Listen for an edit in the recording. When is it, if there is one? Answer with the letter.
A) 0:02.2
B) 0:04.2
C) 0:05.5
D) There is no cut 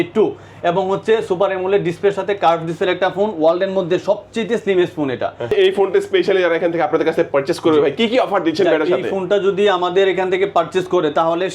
C